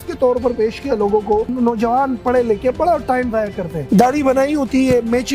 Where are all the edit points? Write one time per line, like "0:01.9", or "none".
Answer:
0:01.5